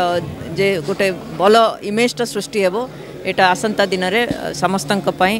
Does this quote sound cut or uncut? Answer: uncut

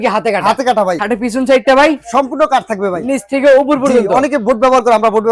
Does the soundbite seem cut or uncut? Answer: cut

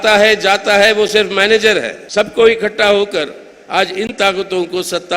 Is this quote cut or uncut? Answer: cut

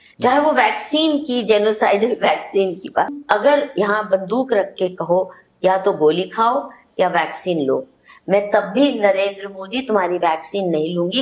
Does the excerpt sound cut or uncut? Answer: cut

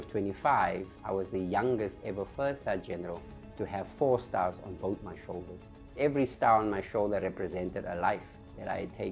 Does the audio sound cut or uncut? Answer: cut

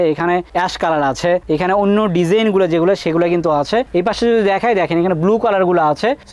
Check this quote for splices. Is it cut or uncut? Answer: uncut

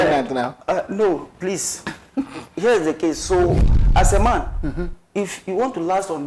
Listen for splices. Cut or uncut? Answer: cut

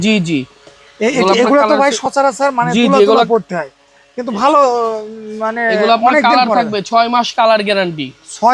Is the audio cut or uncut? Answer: uncut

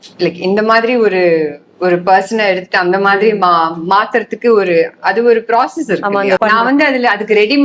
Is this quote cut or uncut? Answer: cut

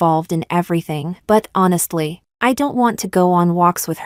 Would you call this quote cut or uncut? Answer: uncut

